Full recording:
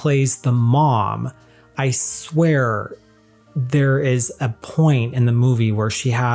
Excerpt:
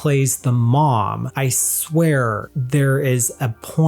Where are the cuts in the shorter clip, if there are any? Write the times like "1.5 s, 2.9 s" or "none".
1.3 s, 2.5 s